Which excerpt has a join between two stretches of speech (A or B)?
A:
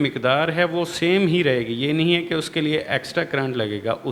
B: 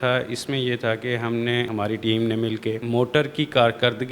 B